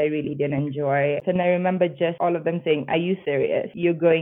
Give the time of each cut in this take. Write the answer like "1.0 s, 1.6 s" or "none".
1.2 s, 2.2 s, 3.4 s